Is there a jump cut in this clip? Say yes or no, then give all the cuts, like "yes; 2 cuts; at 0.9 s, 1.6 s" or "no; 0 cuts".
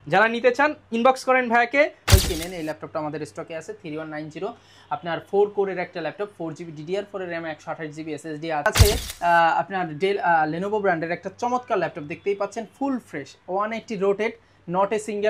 yes; 2 cuts; at 2.1 s, 8.7 s